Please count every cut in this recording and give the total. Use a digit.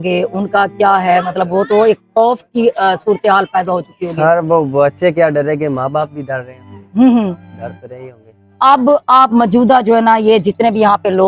1